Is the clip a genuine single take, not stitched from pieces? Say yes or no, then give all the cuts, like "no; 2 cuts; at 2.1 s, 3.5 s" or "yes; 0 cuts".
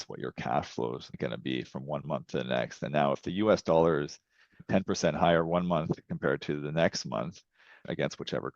no; 2 cuts; at 4.6 s, 7.8 s